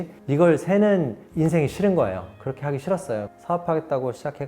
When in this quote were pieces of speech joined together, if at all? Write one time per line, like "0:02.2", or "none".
0:03.3